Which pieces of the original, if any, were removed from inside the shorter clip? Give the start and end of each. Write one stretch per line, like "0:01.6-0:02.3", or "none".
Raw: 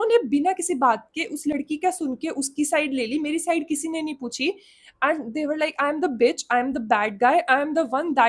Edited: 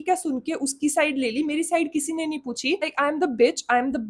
0:04.7-0:05.7